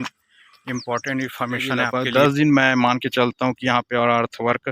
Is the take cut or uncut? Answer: cut